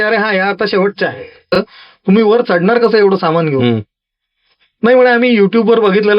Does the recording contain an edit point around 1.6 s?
yes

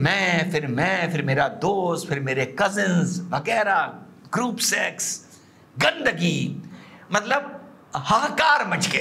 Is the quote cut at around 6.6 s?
no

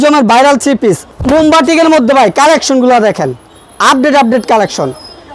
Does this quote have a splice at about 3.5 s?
no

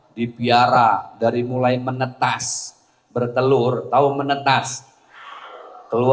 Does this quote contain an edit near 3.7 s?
no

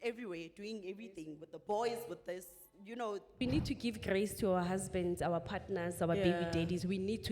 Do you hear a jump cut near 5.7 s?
no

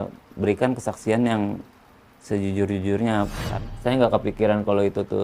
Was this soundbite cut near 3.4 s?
yes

